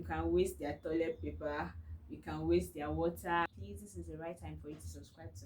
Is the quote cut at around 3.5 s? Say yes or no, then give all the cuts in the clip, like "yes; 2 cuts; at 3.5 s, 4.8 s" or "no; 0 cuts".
yes; 1 cut; at 3.5 s